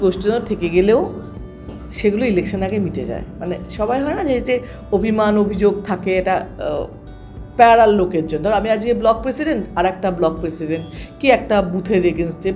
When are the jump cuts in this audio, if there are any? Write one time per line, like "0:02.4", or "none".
none